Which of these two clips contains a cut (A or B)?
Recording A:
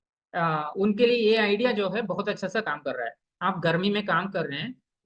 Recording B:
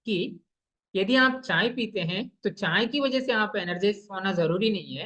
A